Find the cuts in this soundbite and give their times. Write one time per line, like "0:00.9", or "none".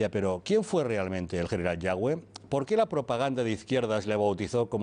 0:01.5